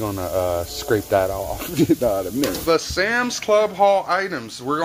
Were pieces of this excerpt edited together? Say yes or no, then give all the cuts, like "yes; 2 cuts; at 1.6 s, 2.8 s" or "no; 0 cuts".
yes; 2 cuts; at 1.9 s, 2.6 s